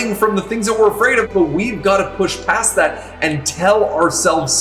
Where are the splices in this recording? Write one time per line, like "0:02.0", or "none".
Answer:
0:01.3